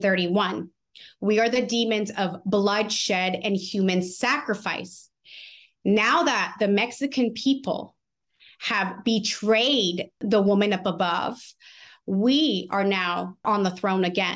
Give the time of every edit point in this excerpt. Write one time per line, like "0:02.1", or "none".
0:10.2
0:13.4

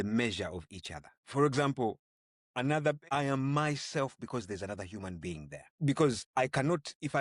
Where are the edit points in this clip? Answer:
0:01.2
0:03.0
0:05.7
0:06.2

